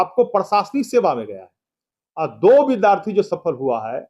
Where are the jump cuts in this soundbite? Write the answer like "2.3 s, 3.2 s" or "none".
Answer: none